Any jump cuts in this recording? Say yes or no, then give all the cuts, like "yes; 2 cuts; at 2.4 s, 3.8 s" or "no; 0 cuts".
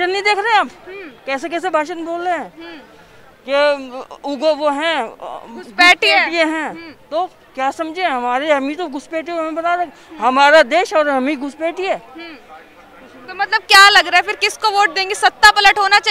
no; 0 cuts